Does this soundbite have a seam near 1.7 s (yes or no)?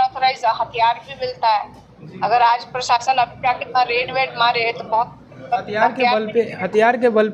no